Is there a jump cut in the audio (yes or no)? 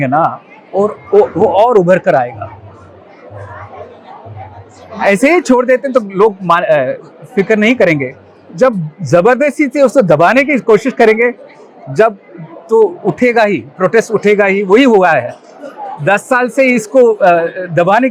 no